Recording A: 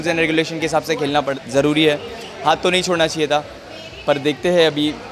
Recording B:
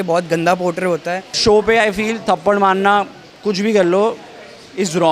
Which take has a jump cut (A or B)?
B